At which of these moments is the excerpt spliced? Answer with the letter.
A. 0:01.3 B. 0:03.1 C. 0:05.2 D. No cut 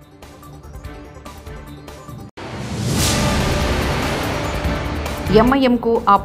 C